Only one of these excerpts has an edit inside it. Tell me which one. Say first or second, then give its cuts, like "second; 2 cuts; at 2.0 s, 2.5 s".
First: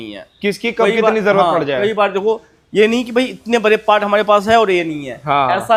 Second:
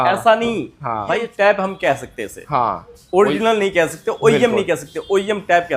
second; 1 cut; at 1.3 s